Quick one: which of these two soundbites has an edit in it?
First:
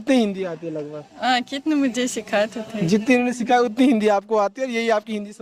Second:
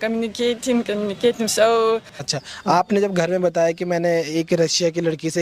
second; 1 cut; at 2.1 s

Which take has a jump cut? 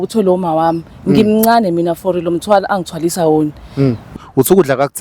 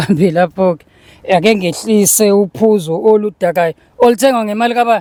first; 1 cut; at 4.1 s

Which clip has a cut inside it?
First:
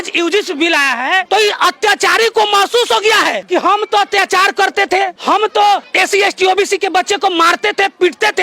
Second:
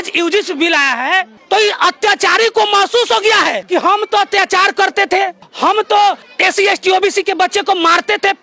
first; 3 cuts; at 1.2 s, 5.2 s, 5.9 s

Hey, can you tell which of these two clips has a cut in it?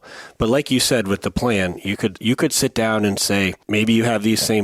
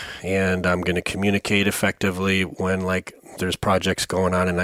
first; 1 cut; at 3.6 s

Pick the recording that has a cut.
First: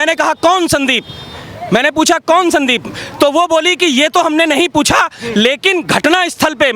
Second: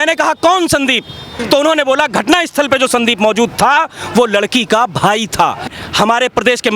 second; 2 cuts; at 1.3 s, 5.7 s

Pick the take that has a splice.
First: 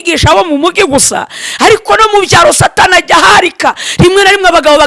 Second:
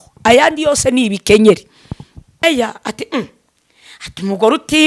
second; 1 cut; at 2.4 s

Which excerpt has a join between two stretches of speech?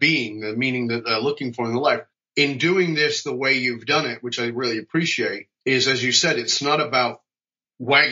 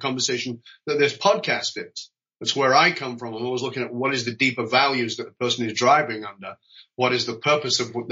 first; 2 cuts; at 2.2 s, 5.5 s

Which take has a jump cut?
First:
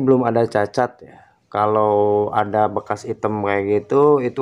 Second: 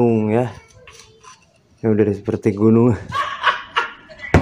second; 1 cut; at 3.3 s

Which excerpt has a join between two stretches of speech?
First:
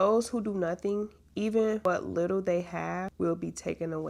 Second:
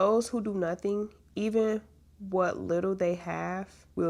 first; 2 cuts; at 1.9 s, 3.1 s

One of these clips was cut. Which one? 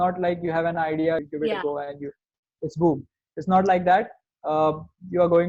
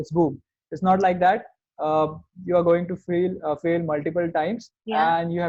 first; 1 cut; at 1.2 s

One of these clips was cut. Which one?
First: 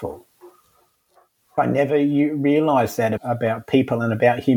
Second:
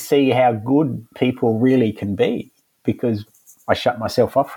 first; 2 cuts; at 1.5 s, 3.2 s

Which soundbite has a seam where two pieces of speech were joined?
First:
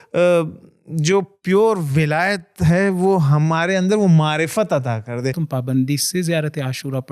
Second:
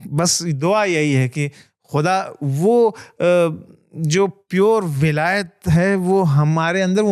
first; 1 cut; at 5.4 s

